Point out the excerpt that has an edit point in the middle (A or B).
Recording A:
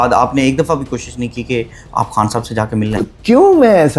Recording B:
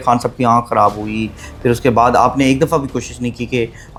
A